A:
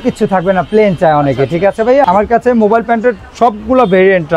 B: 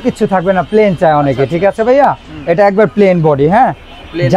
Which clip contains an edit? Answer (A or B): A